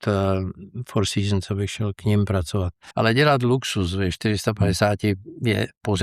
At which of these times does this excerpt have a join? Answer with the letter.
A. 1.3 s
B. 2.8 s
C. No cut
B